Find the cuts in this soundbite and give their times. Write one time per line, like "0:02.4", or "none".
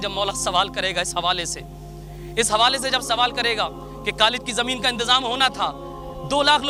none